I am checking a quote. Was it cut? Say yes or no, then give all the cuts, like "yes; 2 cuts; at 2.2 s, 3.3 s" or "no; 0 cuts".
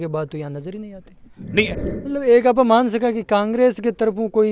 yes; 1 cut; at 1.7 s